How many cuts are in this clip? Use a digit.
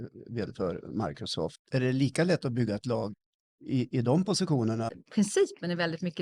2